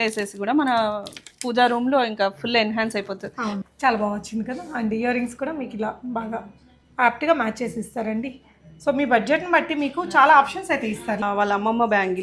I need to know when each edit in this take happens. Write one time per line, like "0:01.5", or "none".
0:03.6
0:11.2